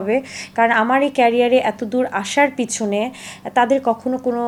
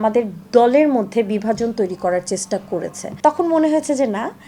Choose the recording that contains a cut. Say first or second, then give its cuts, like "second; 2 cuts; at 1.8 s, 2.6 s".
second; 1 cut; at 3.1 s